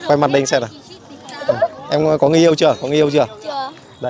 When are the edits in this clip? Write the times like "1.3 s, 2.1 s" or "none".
none